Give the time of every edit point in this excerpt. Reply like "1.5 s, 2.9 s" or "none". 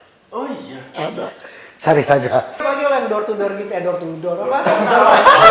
2.6 s